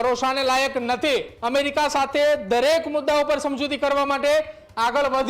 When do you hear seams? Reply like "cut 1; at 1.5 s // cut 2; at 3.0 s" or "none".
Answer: cut 1; at 1.3 s